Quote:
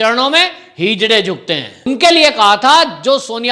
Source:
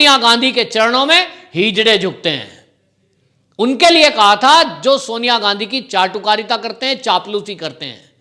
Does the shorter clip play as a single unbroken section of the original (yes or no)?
no